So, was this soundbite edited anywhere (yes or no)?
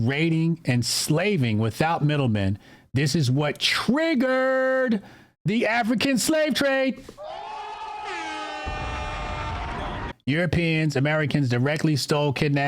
yes